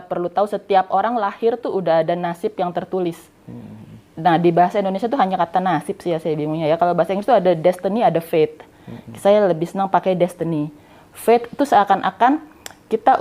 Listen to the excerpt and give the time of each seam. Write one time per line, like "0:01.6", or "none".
none